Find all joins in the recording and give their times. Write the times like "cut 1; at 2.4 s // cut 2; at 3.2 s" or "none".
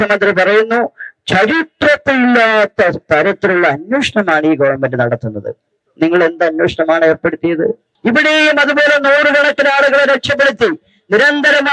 cut 1; at 7.9 s

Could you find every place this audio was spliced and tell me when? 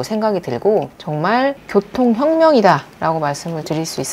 cut 1; at 1.0 s

